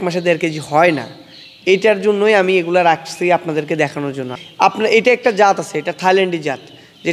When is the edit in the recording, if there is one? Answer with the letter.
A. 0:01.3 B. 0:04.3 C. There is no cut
B